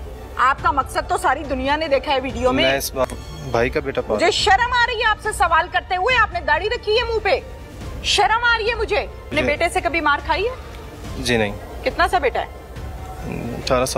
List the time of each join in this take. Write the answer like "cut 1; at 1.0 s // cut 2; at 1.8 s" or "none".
cut 1; at 3.0 s // cut 2; at 9.3 s